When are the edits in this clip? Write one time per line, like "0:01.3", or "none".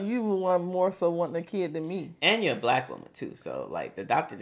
none